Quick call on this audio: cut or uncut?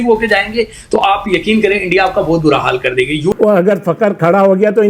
cut